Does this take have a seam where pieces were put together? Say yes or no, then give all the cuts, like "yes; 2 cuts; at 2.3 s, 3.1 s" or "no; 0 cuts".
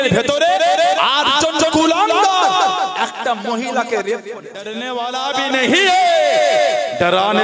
yes; 1 cut; at 4.8 s